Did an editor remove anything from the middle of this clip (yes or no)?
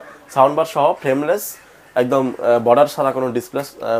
no